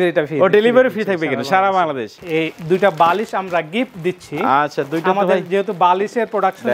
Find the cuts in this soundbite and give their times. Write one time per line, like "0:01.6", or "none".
0:02.1